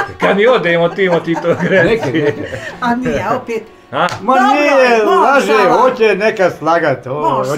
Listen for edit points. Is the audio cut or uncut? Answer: uncut